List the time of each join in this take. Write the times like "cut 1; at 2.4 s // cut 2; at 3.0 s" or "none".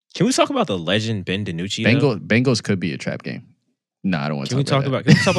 none